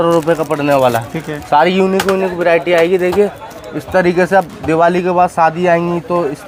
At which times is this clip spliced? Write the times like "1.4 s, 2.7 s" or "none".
none